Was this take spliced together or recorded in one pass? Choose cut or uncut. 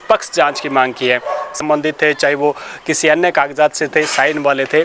cut